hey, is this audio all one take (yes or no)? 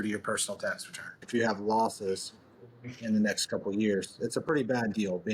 no